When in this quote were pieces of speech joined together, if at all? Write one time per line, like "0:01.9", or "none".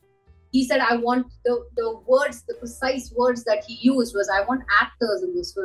none